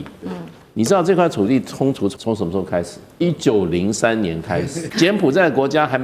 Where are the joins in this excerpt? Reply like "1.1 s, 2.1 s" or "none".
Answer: 2.1 s, 3.0 s, 4.8 s